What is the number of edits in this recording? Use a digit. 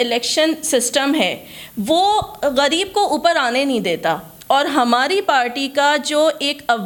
0